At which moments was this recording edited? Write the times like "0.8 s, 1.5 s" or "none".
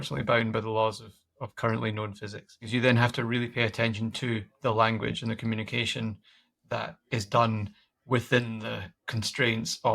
2.7 s